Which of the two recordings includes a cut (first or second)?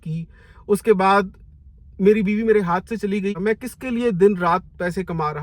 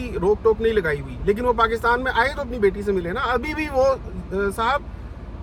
first